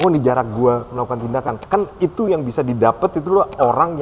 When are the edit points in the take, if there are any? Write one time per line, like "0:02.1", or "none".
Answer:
0:01.6